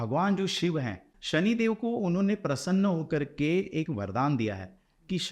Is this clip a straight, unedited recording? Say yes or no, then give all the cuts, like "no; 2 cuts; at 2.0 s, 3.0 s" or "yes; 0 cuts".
no; 1 cut; at 1.1 s